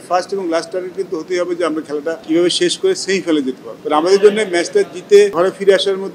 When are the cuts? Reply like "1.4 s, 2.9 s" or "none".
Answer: 2.2 s, 3.7 s, 5.3 s

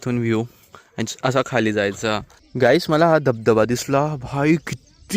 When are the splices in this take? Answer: 2.3 s

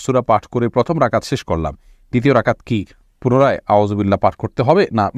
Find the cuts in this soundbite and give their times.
none

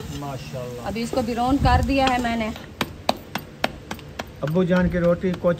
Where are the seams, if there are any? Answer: 2.7 s

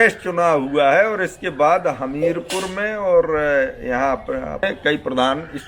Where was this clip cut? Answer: 4.6 s

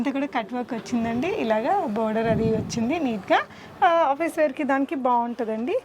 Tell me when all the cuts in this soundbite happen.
none

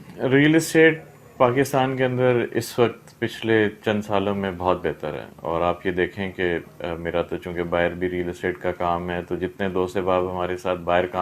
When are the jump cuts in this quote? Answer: none

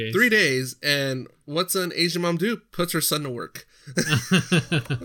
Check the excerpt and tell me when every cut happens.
4.1 s

